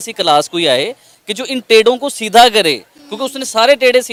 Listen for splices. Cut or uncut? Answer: uncut